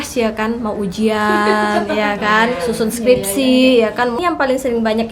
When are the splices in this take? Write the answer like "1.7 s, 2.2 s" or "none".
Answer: 4.2 s